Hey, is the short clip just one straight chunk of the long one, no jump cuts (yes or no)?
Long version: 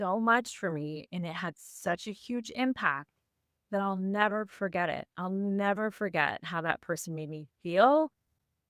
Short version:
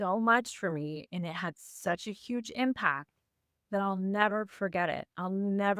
yes